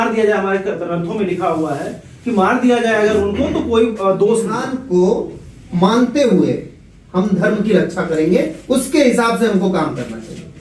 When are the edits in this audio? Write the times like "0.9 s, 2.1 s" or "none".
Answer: 4.7 s